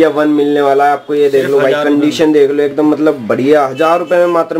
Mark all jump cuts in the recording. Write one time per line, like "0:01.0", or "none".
none

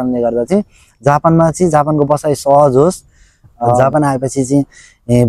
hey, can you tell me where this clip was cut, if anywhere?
0:03.8

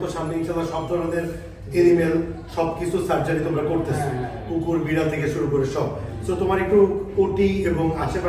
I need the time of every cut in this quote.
none

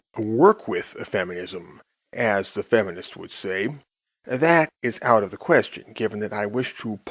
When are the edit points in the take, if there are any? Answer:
none

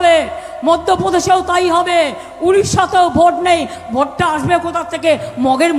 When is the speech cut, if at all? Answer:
none

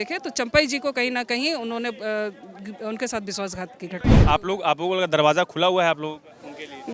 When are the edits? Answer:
0:04.2

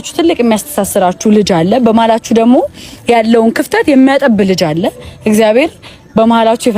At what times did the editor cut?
none

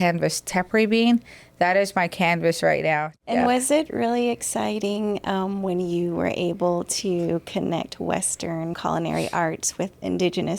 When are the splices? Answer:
0:03.1
0:08.8

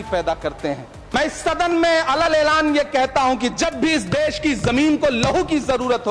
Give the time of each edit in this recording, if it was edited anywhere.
0:00.9

